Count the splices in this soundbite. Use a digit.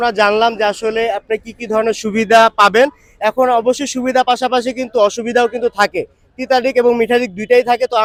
0